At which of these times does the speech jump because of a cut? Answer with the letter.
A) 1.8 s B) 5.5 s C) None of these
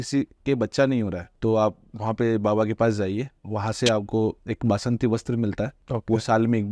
C